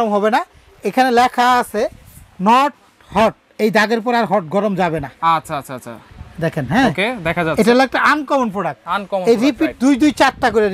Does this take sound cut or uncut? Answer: uncut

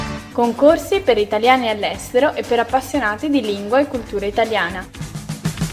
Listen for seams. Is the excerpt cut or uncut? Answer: cut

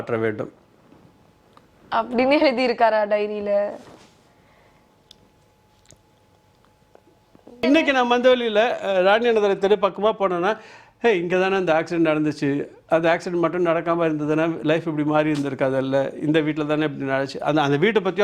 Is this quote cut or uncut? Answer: cut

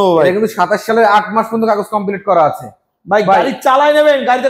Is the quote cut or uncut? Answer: uncut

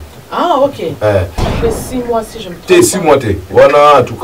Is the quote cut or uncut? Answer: cut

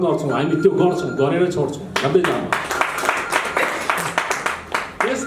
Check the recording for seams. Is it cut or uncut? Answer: uncut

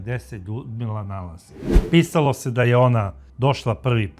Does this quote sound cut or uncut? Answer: cut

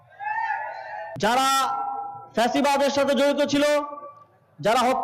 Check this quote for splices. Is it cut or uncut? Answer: cut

